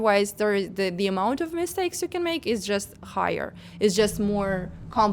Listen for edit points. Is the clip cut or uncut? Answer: uncut